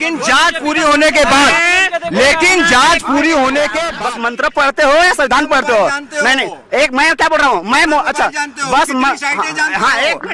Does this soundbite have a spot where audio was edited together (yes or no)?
yes